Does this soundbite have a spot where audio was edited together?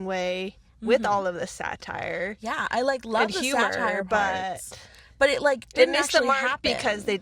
no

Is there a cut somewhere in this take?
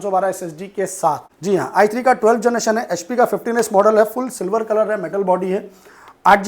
yes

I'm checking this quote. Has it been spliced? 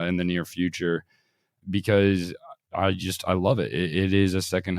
yes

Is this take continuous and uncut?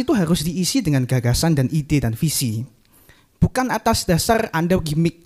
yes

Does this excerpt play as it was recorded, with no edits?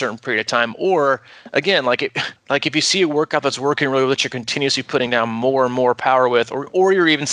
no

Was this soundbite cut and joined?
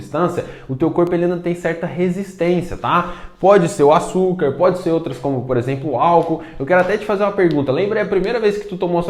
no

